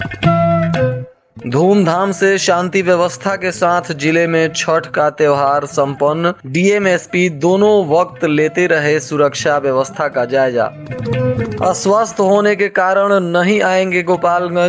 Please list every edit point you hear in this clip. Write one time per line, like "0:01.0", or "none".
0:01.1